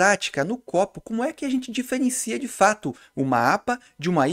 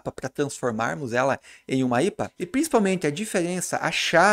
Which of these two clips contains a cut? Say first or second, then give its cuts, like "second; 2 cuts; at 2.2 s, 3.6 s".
second; 1 cut; at 2.4 s